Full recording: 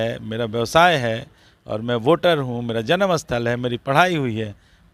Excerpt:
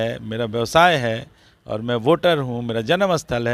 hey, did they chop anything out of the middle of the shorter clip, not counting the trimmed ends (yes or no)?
no